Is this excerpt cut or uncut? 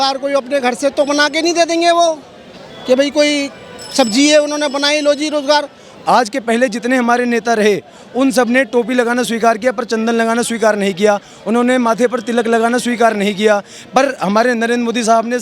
cut